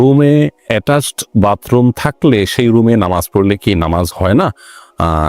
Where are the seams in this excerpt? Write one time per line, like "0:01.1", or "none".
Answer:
none